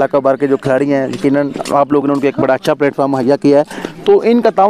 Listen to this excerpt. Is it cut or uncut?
uncut